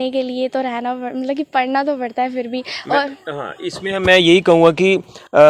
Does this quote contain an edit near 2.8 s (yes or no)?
no